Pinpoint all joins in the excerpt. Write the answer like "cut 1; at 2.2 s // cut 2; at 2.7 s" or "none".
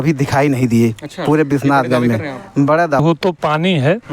cut 1; at 3.0 s

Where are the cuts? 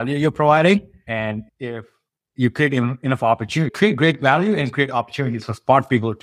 cut 1; at 1.1 s

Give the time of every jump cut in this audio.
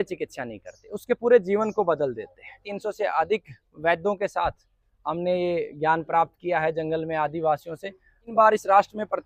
cut 1; at 2.7 s // cut 2; at 8.3 s

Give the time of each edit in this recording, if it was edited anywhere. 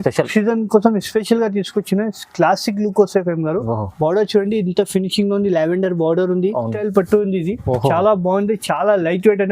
cut 1; at 6.7 s

